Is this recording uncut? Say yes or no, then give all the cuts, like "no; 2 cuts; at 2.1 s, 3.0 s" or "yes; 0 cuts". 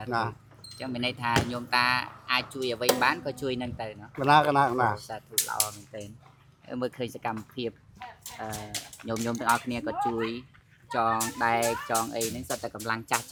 yes; 0 cuts